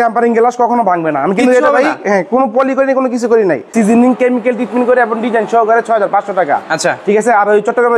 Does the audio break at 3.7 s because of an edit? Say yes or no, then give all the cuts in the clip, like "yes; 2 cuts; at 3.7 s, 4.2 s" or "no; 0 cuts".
yes; 1 cut; at 3.7 s